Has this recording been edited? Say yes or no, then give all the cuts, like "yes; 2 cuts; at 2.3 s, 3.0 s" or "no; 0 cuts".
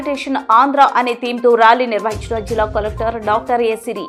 no; 0 cuts